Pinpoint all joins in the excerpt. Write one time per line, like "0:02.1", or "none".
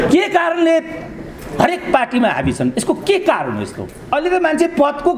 0:04.1